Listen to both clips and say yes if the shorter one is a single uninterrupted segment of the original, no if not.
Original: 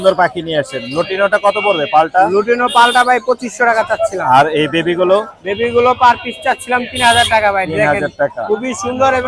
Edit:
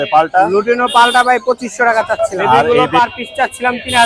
no